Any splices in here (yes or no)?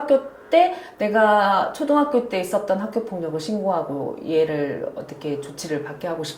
no